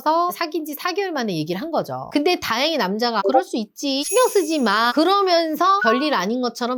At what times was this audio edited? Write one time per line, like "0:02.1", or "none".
none